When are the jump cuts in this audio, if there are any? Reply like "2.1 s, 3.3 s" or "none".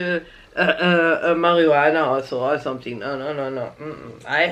none